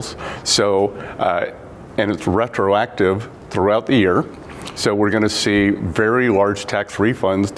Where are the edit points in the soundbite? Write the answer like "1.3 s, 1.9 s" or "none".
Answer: none